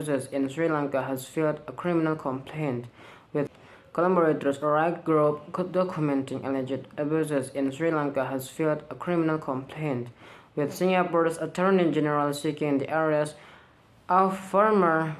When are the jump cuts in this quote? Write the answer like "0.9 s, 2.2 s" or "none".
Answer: 3.5 s